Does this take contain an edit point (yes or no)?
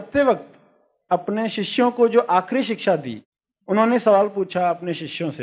yes